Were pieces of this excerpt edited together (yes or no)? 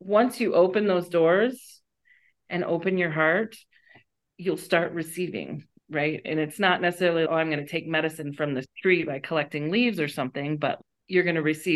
no